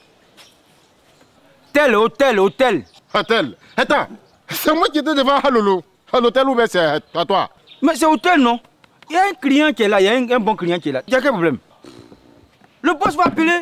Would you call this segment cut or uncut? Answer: uncut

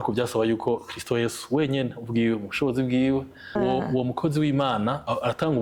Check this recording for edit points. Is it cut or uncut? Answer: cut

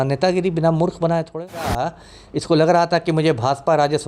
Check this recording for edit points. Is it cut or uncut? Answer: cut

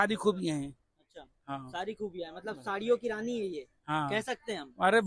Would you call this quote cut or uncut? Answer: uncut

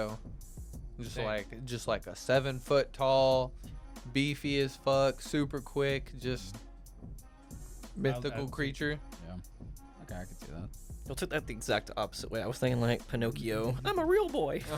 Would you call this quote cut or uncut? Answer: uncut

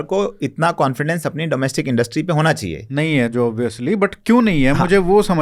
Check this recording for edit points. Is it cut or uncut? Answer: uncut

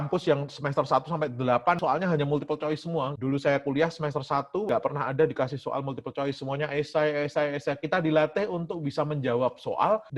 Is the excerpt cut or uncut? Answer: uncut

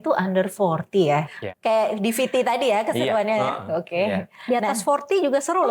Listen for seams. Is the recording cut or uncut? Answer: cut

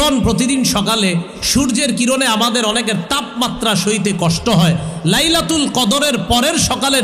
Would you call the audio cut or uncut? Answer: uncut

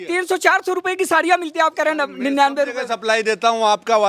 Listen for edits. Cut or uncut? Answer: uncut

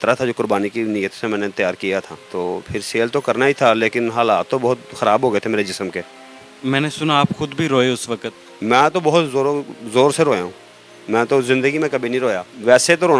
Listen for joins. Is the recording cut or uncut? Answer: uncut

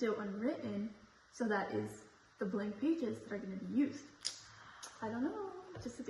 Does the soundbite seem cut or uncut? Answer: uncut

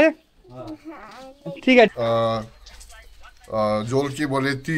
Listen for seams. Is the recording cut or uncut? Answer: cut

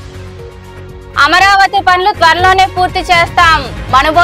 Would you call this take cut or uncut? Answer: cut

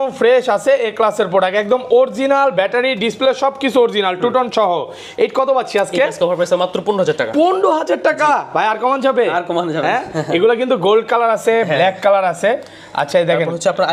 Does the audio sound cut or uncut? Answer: uncut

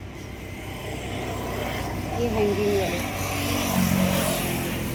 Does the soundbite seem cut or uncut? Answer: uncut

